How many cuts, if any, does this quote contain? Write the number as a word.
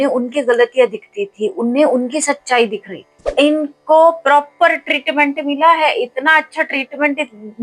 one